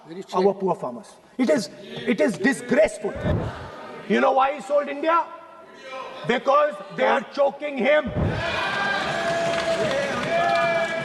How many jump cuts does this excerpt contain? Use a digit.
2